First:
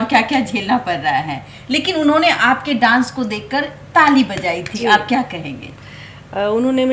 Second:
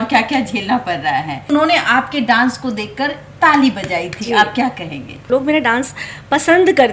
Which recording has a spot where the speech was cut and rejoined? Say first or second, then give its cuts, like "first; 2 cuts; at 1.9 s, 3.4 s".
second; 2 cuts; at 1.5 s, 5.2 s